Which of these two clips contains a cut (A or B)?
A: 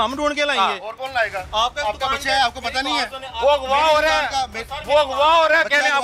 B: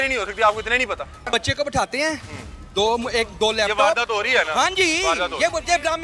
B